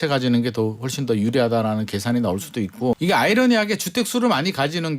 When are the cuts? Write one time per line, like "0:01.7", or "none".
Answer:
0:03.0